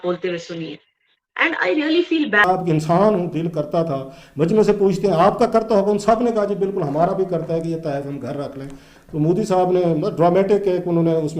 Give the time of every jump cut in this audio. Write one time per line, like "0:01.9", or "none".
0:02.4